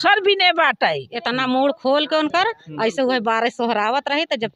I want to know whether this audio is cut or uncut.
cut